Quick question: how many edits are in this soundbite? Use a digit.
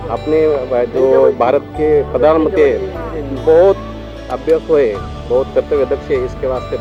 0